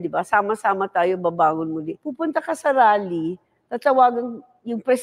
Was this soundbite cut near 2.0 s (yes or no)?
yes